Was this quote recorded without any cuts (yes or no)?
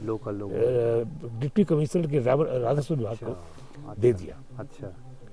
yes